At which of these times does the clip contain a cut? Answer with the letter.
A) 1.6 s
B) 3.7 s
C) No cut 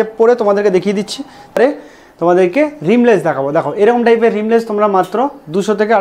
A